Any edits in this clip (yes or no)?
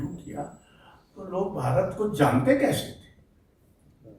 no